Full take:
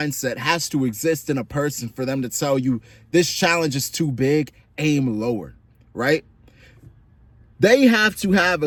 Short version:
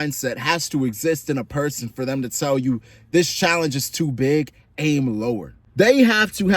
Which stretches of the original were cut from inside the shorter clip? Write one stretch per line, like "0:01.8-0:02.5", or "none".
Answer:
0:05.6-0:07.4